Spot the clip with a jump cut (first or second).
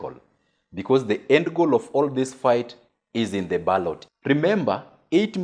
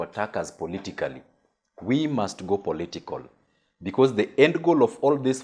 first